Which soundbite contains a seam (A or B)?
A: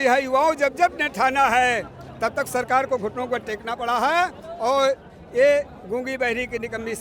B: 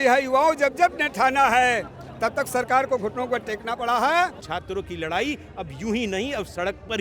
B